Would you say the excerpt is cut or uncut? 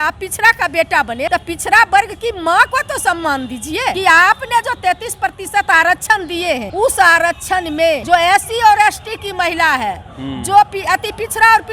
cut